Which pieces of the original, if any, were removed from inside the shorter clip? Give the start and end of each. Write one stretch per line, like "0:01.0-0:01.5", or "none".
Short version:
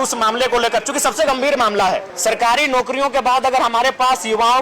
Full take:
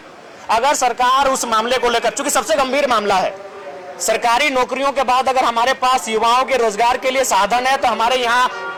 0:03.4-0:03.9